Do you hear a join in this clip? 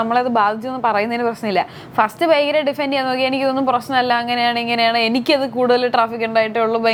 no; 0 cuts

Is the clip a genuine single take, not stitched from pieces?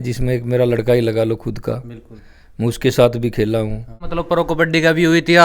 no; 1 cut; at 4.0 s

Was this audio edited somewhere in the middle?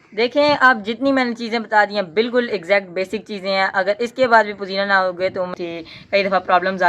yes; 1 cut; at 5.5 s

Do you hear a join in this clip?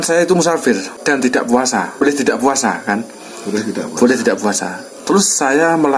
yes; 2 cuts; at 0.9 s, 2.0 s

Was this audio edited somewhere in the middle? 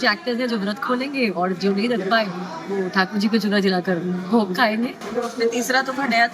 yes; 1 cut; at 5.0 s

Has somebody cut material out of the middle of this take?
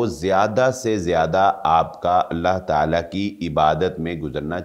no; 0 cuts

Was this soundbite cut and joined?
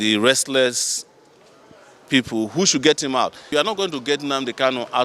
yes; 1 cut; at 3.5 s

